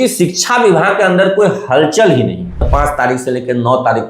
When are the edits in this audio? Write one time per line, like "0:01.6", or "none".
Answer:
0:02.7